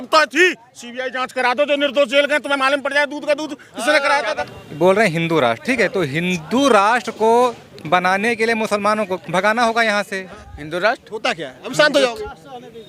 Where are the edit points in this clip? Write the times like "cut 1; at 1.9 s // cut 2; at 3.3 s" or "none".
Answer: cut 1; at 4.5 s // cut 2; at 10.4 s